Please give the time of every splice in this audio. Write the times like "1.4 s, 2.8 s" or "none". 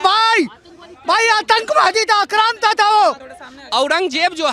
3.3 s